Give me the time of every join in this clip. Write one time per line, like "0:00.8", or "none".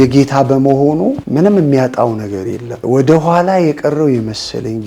0:01.2
0:02.7